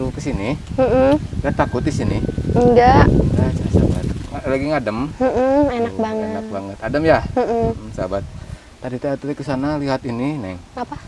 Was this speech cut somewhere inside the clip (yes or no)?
no